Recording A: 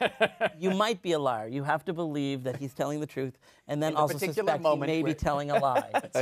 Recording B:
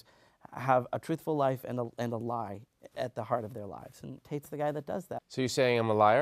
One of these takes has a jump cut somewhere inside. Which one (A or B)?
B